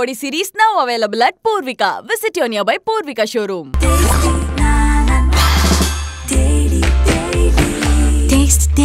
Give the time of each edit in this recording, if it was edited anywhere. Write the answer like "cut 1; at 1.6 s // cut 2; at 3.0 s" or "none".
none